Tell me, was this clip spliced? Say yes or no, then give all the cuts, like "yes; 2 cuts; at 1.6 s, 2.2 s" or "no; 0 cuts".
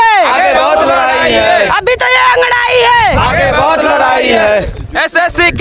no; 0 cuts